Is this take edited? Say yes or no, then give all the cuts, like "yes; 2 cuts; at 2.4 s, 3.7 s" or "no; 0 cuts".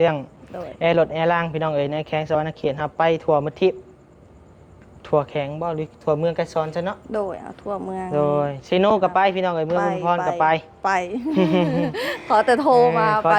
no; 0 cuts